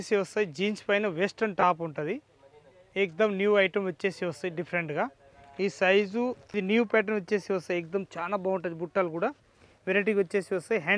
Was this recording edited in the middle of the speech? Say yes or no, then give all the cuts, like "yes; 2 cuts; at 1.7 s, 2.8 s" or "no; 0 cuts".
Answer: yes; 1 cut; at 6.4 s